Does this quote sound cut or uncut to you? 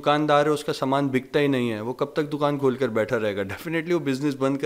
uncut